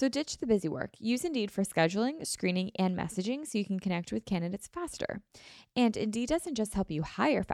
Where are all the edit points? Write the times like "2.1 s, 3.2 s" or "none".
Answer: none